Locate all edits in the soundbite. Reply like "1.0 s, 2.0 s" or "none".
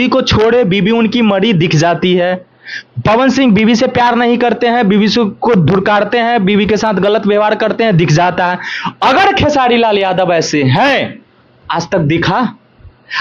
none